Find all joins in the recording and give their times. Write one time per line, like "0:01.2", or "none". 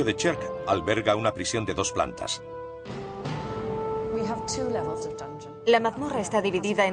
none